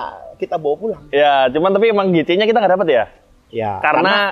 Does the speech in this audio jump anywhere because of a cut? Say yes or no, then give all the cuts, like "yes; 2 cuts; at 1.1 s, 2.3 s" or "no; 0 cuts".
no; 0 cuts